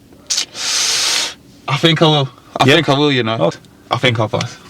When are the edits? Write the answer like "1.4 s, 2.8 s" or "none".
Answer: 3.5 s